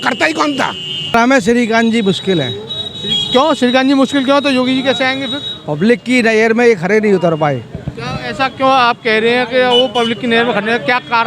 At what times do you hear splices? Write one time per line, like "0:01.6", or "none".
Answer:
0:01.1